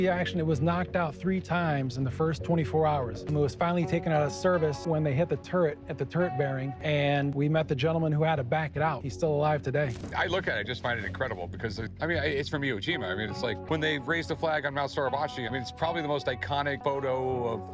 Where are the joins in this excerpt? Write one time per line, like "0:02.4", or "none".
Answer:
none